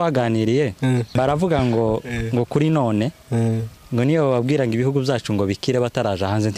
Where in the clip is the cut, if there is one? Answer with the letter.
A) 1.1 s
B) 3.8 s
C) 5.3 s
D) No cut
A